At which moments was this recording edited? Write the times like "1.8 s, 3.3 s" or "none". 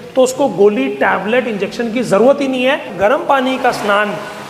2.9 s